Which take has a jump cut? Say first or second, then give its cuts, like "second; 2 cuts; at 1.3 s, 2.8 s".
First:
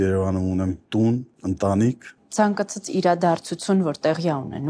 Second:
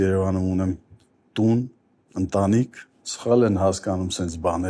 first; 3 cuts; at 0.8 s, 1.3 s, 2.1 s